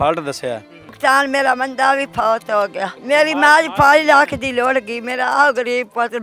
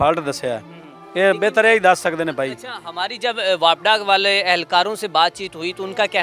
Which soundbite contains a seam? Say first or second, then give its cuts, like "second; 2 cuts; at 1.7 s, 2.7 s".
first; 2 cuts; at 0.9 s, 2.9 s